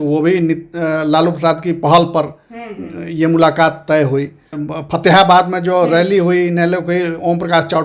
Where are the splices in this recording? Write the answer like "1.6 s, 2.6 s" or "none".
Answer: 4.6 s